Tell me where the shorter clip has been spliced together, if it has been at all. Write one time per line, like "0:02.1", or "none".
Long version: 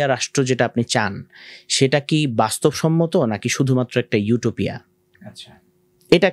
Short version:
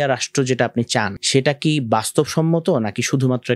0:01.2